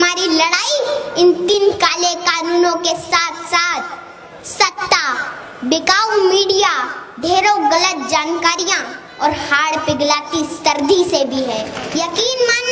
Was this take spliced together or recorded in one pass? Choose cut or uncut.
cut